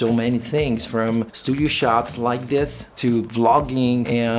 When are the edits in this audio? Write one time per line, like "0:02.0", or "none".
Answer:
none